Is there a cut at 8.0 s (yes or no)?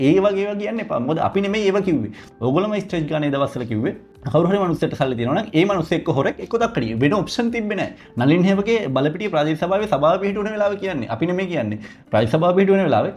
no